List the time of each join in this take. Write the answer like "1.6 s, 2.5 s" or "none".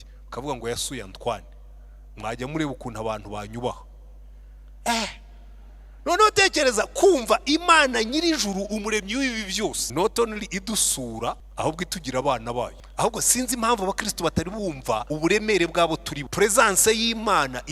9.8 s, 11.4 s, 12.8 s, 15.1 s, 16.2 s